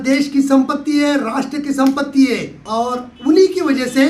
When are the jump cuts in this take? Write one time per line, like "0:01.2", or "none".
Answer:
0:02.6